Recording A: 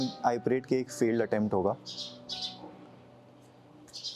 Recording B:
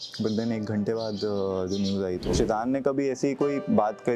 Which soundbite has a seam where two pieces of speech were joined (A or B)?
B